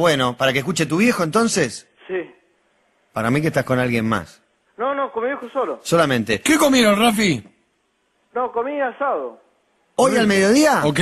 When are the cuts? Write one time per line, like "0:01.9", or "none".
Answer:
0:01.7